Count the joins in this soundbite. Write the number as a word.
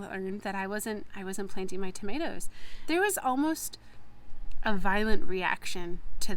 one